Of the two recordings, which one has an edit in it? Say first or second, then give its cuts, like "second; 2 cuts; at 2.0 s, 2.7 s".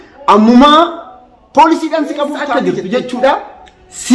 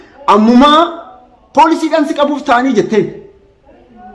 first; 1 cut; at 2.5 s